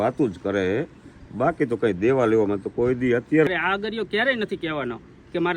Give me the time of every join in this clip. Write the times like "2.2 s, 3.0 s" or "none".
3.5 s